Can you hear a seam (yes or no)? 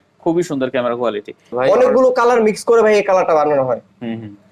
yes